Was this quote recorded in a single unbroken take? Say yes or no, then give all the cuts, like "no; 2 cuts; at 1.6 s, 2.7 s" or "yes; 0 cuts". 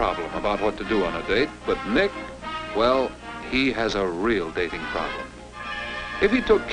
no; 1 cut; at 4.5 s